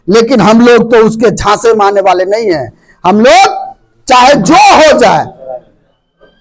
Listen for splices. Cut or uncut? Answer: uncut